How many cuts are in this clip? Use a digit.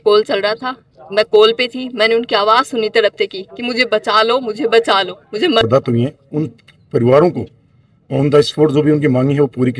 1